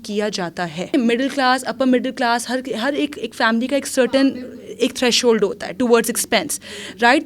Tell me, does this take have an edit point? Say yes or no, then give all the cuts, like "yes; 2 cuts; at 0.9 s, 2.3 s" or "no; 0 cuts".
yes; 1 cut; at 0.9 s